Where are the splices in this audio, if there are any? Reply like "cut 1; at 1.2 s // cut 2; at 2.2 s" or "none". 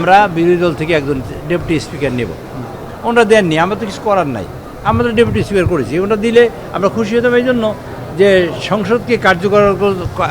none

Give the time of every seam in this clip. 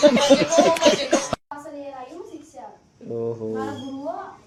none

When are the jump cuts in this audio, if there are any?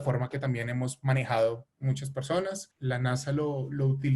cut 1; at 2.7 s

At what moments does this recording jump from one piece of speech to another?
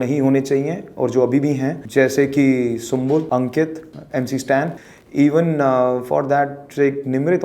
cut 1; at 3.3 s // cut 2; at 4.8 s

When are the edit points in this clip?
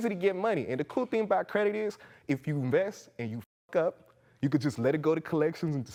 none

